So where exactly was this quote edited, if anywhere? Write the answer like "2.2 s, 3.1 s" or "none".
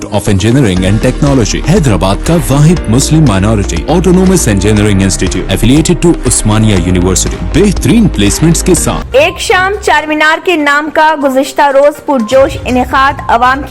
9.0 s

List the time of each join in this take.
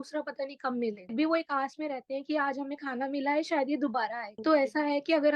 1.1 s, 4.3 s

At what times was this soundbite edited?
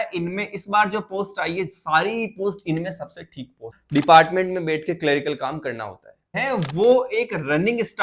3.7 s, 6.4 s

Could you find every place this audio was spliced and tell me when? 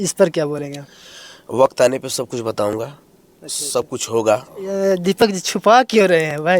4.7 s

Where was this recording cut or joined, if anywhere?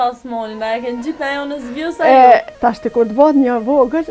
2.5 s

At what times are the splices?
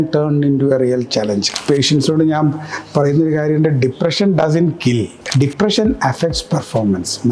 1.5 s, 5.2 s

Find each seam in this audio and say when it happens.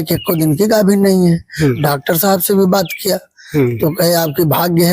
1.8 s

